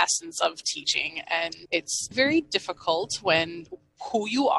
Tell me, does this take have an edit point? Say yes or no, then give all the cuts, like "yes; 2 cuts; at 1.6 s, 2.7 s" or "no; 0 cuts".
yes; 1 cut; at 2.1 s